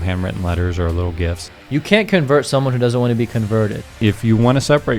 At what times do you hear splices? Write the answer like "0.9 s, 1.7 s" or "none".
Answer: 1.5 s, 4.0 s